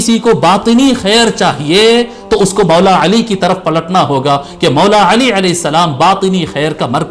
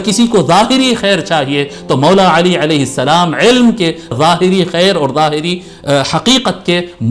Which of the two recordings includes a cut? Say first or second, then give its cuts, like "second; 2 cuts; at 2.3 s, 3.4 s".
second; 1 cut; at 4.1 s